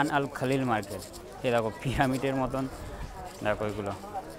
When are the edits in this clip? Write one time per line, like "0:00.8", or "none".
none